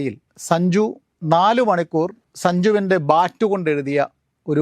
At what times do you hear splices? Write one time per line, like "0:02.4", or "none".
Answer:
0:01.1
0:02.2